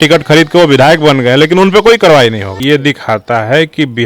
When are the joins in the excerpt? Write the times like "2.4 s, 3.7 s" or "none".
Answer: 2.5 s